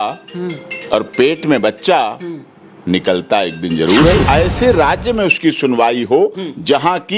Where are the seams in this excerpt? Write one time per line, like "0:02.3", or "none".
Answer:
0:04.2

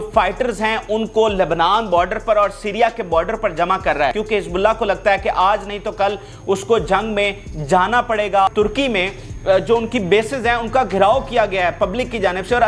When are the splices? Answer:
0:04.1
0:08.5

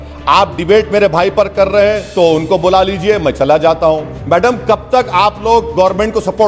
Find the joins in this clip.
0:04.1

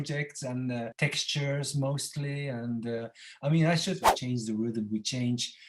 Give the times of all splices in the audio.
0:00.9
0:04.1

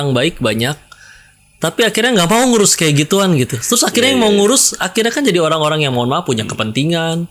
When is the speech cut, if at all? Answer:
none

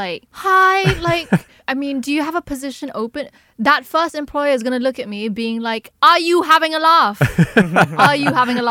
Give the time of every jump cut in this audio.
none

